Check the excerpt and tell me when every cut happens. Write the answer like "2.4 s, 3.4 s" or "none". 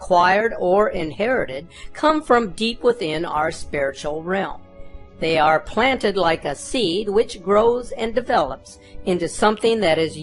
7.5 s